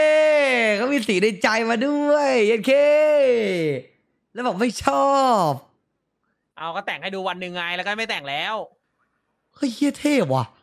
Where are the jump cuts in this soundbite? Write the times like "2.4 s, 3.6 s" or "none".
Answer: none